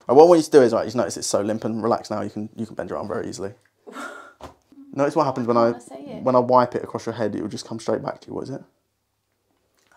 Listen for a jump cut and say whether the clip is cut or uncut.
cut